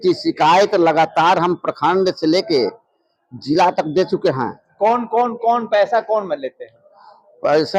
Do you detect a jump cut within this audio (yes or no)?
no